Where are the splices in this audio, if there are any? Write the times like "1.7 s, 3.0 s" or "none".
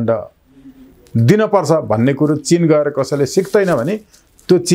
none